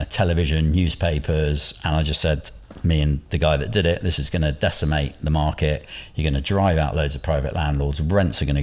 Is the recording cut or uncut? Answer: uncut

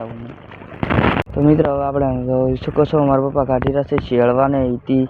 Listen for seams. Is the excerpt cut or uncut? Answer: uncut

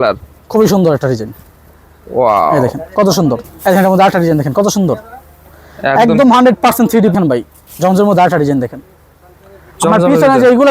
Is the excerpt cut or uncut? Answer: cut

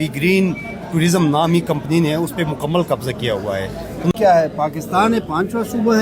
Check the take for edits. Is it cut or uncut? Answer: cut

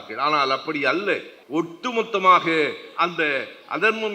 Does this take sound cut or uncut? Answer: cut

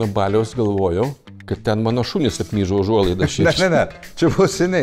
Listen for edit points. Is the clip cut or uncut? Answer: cut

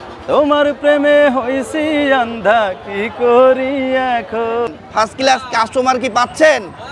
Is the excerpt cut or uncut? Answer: cut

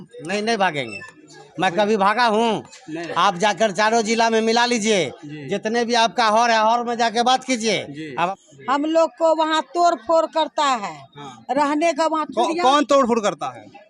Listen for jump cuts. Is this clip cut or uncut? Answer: cut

